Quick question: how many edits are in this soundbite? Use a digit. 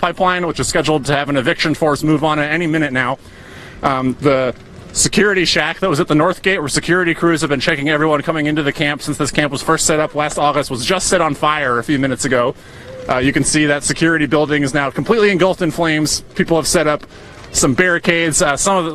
1